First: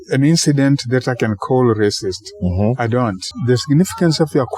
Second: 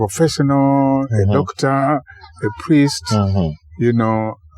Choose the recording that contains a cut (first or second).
first